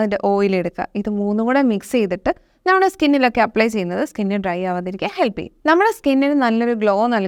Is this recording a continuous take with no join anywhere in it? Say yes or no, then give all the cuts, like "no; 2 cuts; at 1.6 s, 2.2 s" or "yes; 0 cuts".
yes; 0 cuts